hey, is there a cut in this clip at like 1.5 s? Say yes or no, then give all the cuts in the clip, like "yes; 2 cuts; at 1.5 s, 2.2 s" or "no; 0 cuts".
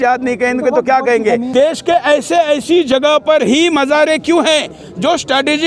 yes; 1 cut; at 1.5 s